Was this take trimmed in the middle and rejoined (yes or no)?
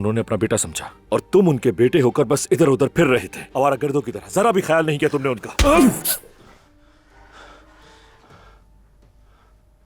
no